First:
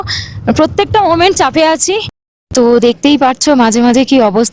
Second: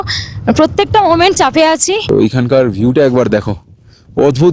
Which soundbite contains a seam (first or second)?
second